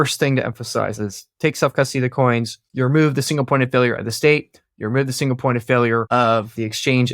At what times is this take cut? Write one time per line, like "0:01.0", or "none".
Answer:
0:00.9
0:02.6
0:06.2